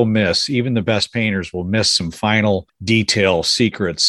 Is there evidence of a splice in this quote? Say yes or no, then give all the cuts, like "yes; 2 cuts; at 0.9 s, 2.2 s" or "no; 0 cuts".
yes; 1 cut; at 2.7 s